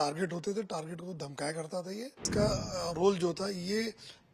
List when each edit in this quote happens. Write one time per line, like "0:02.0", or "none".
0:02.3